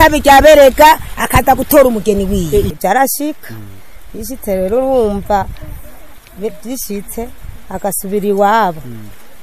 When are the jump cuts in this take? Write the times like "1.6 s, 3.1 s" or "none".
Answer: 2.8 s

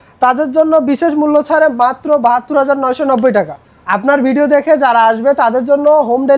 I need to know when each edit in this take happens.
3.6 s

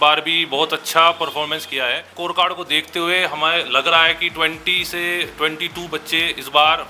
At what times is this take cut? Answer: 2.1 s

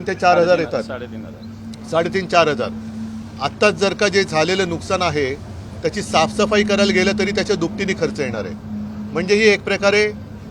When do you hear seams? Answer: none

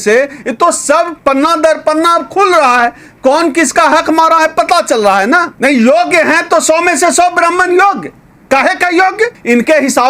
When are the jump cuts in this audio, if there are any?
1.1 s, 5.5 s, 9.3 s

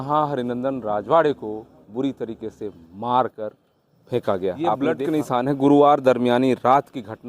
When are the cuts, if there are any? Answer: 4.8 s

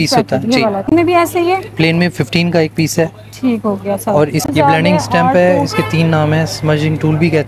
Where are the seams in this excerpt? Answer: 0.9 s, 4.5 s

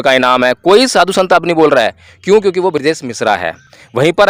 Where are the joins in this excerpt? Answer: none

